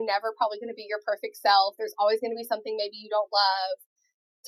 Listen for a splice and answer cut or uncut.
uncut